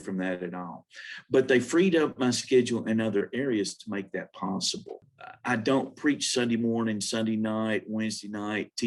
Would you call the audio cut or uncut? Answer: cut